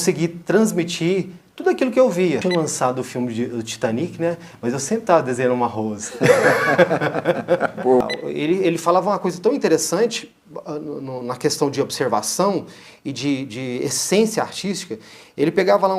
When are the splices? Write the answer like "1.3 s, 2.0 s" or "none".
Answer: 2.4 s, 8.0 s